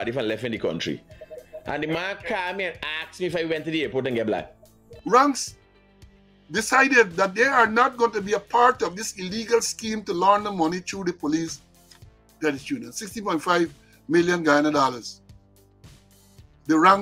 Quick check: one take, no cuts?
no; 1 cut; at 4.9 s

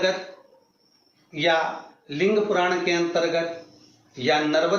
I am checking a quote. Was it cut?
no; 0 cuts

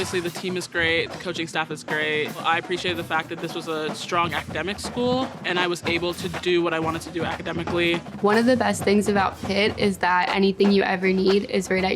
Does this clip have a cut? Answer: yes; 2 cuts; at 2.4 s, 8.1 s

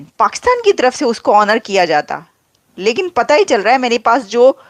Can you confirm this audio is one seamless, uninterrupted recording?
yes; 0 cuts

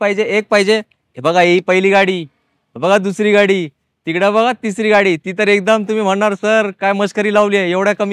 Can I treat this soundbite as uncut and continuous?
yes; 0 cuts

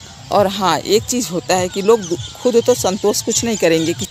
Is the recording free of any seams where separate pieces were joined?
yes; 0 cuts

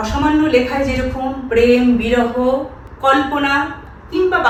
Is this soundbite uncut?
yes; 0 cuts

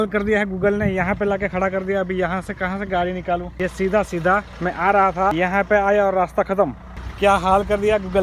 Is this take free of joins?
no; 3 cuts; at 3.5 s, 4.5 s, 5.3 s

